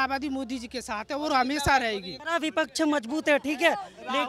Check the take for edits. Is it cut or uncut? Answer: cut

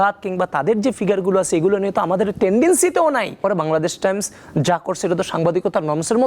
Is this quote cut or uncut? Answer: cut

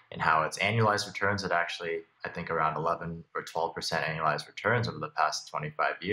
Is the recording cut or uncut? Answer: cut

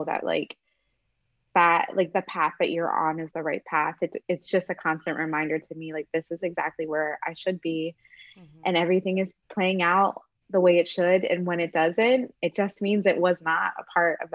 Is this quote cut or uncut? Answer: uncut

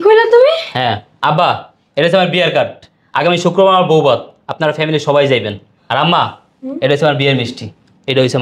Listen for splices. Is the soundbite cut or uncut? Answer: uncut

